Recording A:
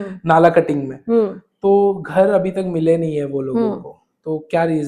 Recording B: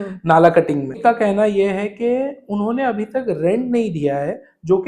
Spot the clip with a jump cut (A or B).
B